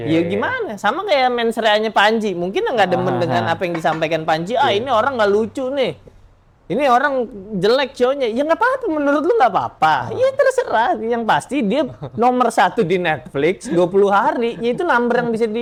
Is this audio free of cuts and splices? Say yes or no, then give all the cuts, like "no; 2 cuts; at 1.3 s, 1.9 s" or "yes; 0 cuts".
yes; 0 cuts